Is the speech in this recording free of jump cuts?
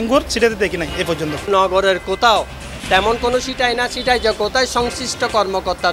yes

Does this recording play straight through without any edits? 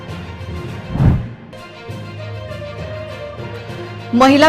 no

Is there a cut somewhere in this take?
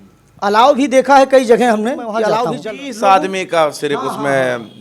yes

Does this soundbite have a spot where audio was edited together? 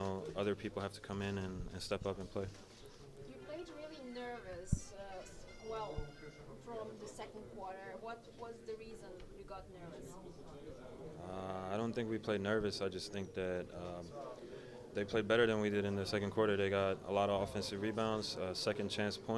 yes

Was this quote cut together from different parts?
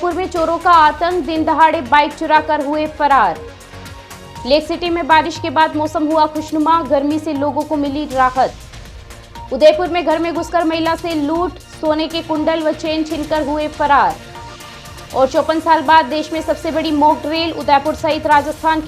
no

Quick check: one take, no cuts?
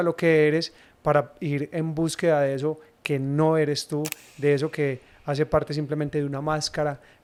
yes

